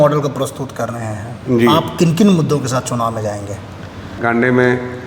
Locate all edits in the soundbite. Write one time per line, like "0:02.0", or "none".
0:04.1